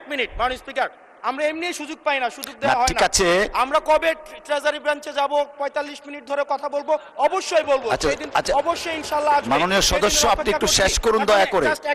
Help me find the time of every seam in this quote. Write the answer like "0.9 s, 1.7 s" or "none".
none